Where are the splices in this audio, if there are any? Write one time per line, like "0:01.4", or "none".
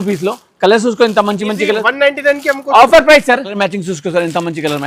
0:03.6